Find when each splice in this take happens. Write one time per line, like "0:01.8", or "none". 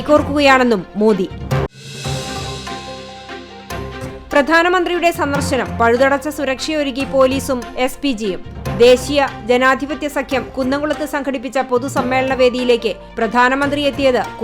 none